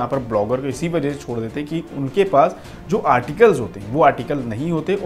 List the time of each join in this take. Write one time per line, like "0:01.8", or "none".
none